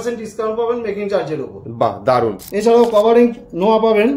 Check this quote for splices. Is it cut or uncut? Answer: cut